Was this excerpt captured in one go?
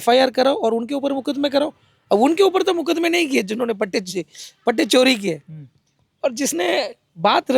yes; 0 cuts

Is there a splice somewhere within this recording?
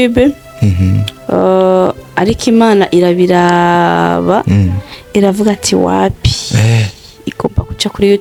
no; 0 cuts

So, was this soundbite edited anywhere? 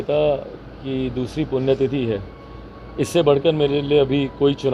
no; 0 cuts

